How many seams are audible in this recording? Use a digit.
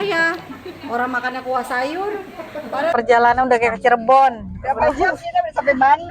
1